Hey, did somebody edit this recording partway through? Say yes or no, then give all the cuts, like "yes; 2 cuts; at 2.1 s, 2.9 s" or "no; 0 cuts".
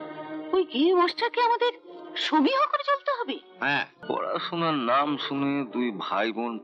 yes; 1 cut; at 4.0 s